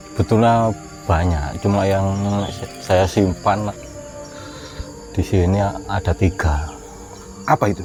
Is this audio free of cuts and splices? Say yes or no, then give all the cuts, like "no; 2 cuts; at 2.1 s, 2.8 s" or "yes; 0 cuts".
yes; 0 cuts